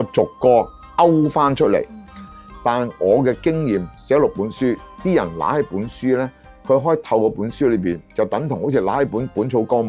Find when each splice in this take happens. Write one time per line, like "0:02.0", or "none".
0:02.3